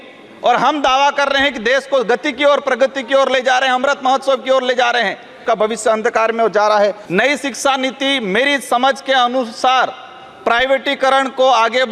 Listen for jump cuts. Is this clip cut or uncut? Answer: cut